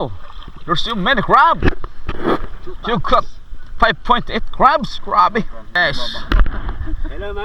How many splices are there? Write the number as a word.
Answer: one